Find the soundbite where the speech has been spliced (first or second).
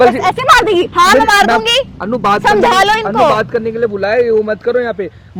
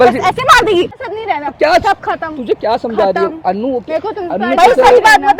second